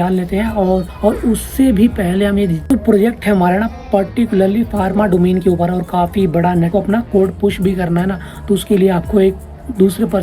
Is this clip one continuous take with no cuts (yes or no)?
no